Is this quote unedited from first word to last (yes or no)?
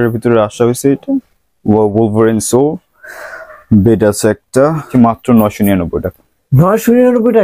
no